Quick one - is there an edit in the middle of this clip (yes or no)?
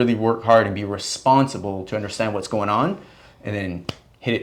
no